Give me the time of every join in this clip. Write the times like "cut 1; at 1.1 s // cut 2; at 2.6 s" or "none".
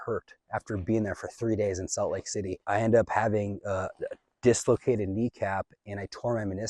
none